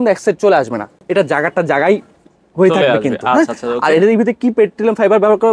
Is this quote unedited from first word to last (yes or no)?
yes